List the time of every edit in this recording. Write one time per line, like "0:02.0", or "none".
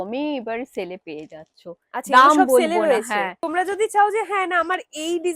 0:03.4